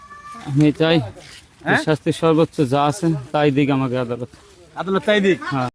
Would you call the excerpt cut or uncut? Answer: uncut